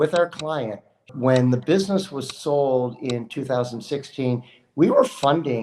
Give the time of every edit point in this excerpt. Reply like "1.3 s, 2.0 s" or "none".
1.1 s